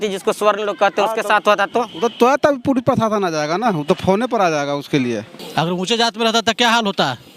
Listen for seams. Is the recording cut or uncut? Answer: cut